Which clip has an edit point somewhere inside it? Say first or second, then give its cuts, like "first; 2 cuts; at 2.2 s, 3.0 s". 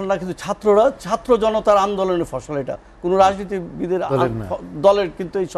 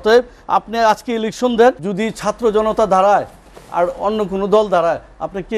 second; 1 cut; at 1.9 s